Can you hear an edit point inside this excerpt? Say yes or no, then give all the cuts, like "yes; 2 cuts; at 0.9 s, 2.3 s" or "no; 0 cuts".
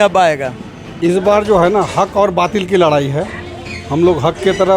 yes; 1 cut; at 1.1 s